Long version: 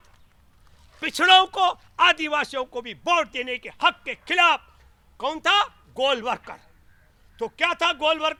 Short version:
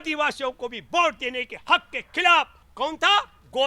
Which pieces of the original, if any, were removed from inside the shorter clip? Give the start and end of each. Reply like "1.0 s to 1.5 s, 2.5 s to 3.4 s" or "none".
4.7 s to 5.0 s